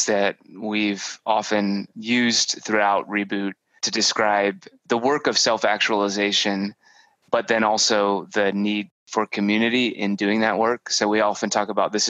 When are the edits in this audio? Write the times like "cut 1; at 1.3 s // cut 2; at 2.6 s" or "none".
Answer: cut 1; at 1.9 s // cut 2; at 3.8 s // cut 3; at 4.7 s

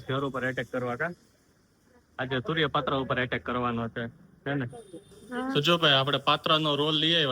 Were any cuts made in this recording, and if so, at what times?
cut 1; at 5.5 s

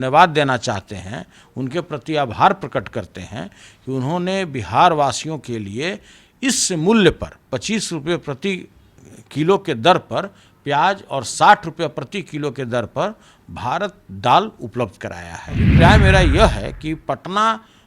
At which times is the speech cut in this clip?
cut 1; at 15.7 s

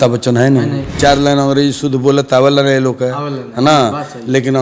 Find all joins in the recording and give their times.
cut 1; at 0.9 s

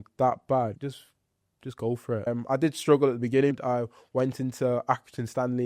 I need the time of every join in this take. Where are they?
cut 1; at 0.8 s // cut 2; at 2.3 s // cut 3; at 3.6 s

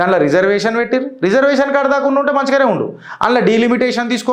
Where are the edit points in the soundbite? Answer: none

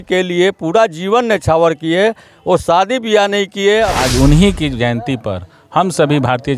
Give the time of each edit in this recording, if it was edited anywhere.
cut 1; at 3.9 s

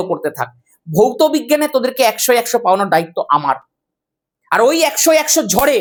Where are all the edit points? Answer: none

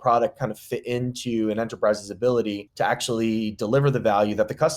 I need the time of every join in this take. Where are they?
cut 1; at 2.6 s

